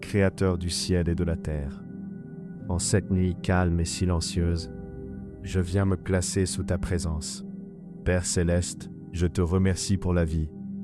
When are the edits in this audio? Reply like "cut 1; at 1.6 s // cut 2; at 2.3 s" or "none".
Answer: cut 1; at 1.6 s // cut 2; at 2.8 s